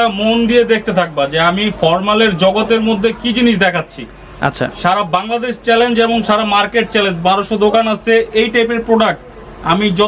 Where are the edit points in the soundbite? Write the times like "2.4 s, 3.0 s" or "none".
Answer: none